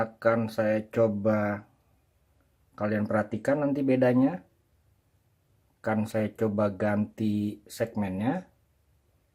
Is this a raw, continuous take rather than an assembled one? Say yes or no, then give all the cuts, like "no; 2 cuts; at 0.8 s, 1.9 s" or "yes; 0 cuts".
yes; 0 cuts